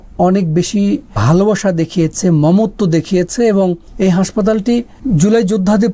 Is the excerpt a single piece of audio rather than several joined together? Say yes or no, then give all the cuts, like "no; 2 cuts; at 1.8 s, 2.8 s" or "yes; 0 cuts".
no; 3 cuts; at 1.2 s, 3.8 s, 4.9 s